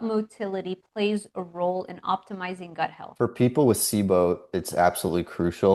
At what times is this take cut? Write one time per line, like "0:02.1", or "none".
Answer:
0:03.0